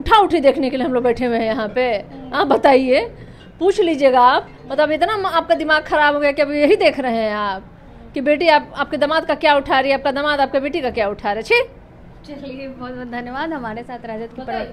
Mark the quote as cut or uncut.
uncut